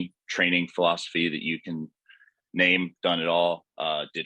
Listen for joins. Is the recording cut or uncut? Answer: uncut